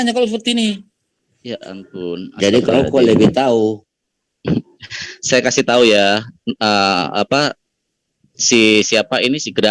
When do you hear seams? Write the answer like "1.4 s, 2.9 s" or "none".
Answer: none